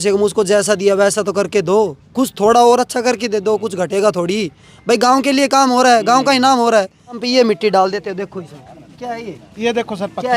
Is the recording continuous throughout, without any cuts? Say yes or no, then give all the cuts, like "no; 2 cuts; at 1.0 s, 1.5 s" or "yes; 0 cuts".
no; 1 cut; at 7.2 s